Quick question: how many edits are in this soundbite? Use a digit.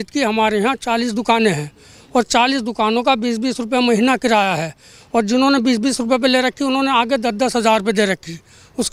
0